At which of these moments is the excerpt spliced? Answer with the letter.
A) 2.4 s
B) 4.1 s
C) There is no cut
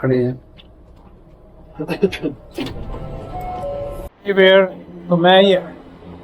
B